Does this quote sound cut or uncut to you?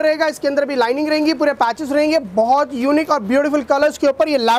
uncut